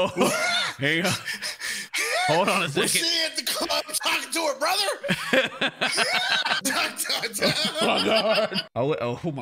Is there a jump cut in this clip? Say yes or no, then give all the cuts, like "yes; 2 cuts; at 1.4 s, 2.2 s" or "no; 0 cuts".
yes; 2 cuts; at 6.6 s, 8.6 s